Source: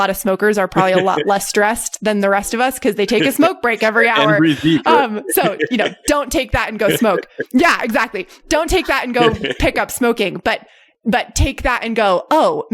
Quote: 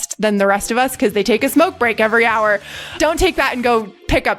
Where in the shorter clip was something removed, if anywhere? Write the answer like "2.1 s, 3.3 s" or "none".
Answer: 2.6 s